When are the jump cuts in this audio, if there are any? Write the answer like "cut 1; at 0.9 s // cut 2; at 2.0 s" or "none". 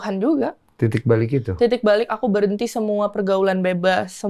none